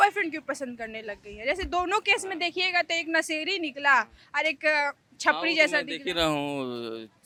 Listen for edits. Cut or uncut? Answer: uncut